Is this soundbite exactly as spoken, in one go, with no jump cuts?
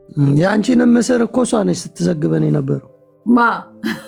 yes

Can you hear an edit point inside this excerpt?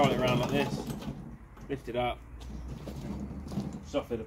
no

